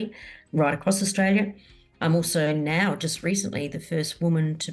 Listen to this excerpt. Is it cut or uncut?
uncut